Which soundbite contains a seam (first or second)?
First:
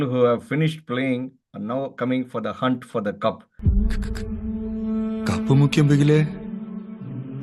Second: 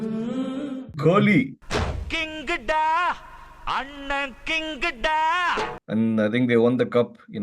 second